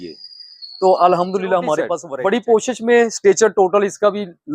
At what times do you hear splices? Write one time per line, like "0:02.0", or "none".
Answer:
0:02.0